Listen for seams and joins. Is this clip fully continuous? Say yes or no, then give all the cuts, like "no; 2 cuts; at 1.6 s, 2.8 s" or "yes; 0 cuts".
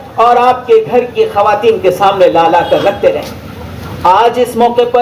yes; 0 cuts